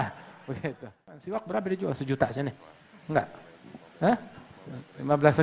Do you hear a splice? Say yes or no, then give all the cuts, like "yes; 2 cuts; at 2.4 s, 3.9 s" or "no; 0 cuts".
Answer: yes; 1 cut; at 1.3 s